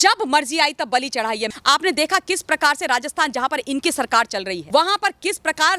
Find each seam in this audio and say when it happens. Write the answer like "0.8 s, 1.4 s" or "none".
1.5 s, 4.6 s